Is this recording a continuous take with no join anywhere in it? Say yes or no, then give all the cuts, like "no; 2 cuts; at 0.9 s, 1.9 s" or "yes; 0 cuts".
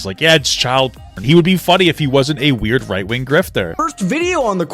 no; 2 cuts; at 1.2 s, 3.7 s